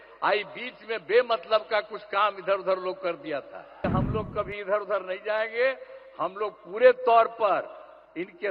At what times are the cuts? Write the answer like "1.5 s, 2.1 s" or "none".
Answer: 3.8 s